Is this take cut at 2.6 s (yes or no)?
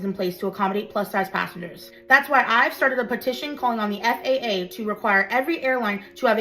yes